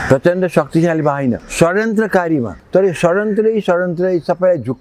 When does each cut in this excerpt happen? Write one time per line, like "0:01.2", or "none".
0:01.5
0:02.6